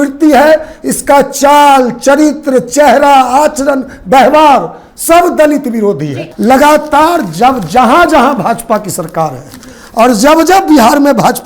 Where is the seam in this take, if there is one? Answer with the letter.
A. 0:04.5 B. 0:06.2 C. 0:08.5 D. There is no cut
B